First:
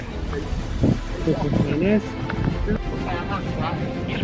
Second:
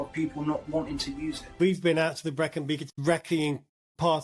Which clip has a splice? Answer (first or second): second